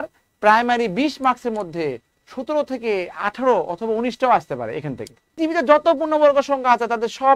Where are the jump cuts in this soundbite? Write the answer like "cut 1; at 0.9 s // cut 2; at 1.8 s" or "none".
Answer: cut 1; at 5.4 s